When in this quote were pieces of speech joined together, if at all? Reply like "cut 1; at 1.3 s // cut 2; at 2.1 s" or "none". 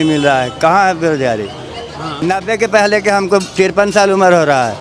cut 1; at 2.2 s